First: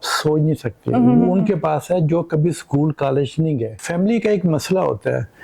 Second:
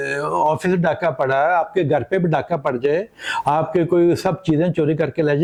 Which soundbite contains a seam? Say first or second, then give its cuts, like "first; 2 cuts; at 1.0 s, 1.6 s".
first; 1 cut; at 3.8 s